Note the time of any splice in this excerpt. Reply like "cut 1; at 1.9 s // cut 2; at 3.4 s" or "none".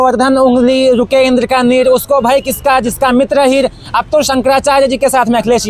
none